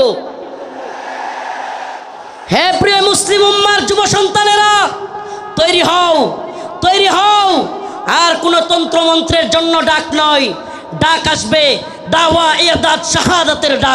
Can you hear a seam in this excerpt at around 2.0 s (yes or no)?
yes